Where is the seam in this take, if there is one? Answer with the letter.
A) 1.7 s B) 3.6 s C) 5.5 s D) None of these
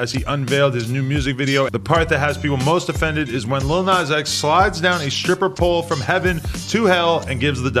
A